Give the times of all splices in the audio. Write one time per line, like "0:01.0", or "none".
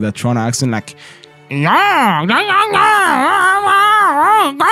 none

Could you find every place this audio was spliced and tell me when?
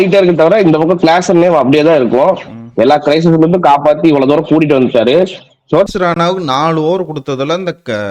0:05.9

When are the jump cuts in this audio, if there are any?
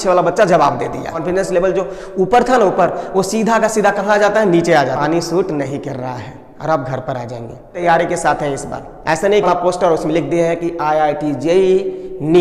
0:01.2
0:05.0
0:07.8
0:09.4

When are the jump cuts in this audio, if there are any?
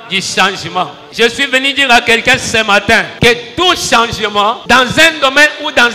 0:01.0
0:03.1
0:04.6

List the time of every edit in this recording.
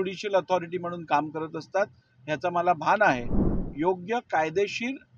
0:03.6

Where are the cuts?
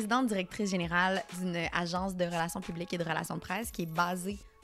0:01.3

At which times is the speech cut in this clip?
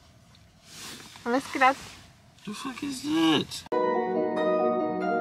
0:03.6

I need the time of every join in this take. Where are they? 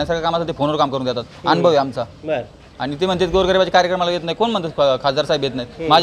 none

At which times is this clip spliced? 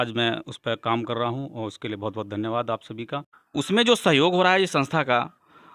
0:03.4

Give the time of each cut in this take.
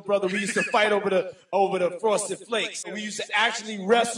0:02.9

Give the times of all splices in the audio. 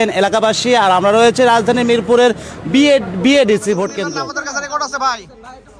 0:04.0

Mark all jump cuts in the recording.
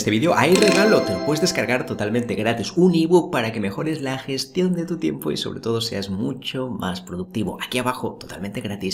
none

